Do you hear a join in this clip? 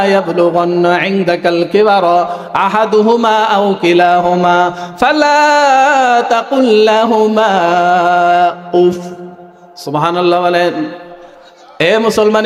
no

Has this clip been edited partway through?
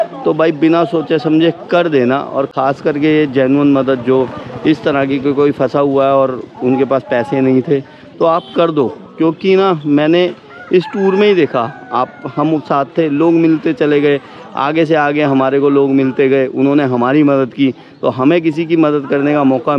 no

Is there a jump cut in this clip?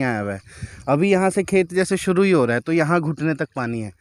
no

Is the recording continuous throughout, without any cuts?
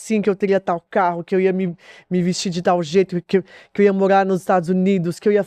yes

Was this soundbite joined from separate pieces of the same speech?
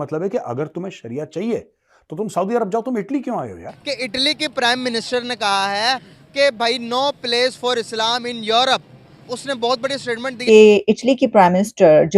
yes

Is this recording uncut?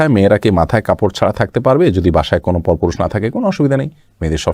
yes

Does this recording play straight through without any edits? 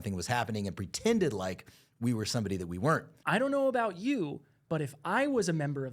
no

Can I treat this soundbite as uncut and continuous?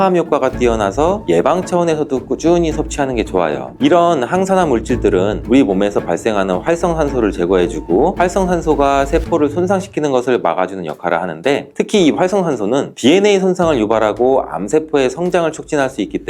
yes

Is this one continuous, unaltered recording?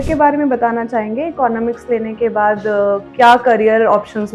yes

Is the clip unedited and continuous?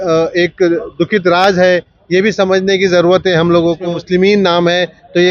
no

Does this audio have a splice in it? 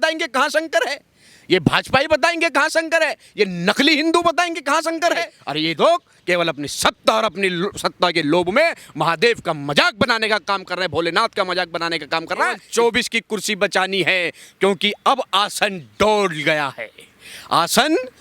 yes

